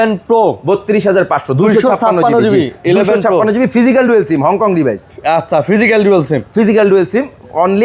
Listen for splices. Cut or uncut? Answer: uncut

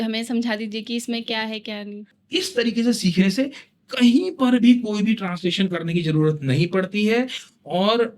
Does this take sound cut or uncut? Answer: cut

